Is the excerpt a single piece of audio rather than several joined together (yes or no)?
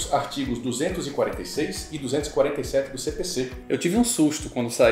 no